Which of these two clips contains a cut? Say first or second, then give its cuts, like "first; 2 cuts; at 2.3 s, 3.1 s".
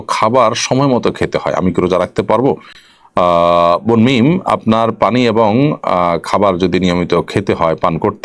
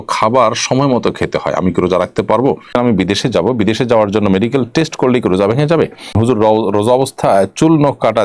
second; 2 cuts; at 2.7 s, 6.2 s